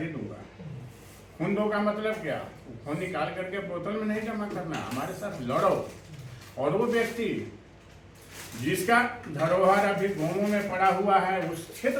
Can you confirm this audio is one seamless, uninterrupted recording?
yes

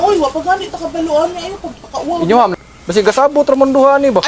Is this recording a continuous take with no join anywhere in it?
no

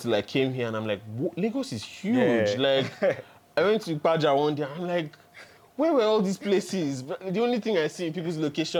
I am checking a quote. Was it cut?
no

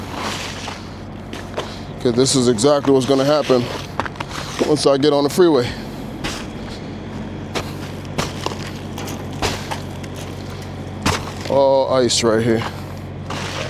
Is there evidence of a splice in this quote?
no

